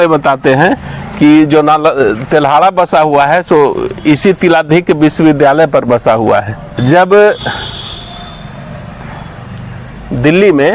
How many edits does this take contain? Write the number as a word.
zero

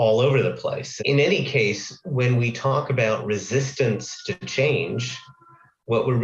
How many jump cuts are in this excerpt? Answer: two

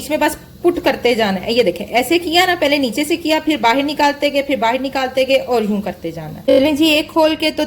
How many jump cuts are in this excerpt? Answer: one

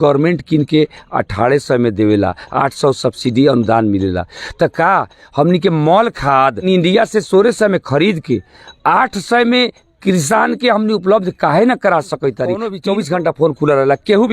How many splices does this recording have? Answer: two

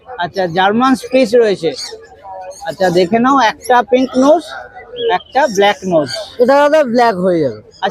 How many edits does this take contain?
zero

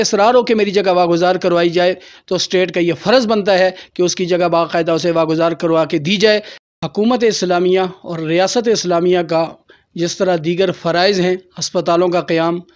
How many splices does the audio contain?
one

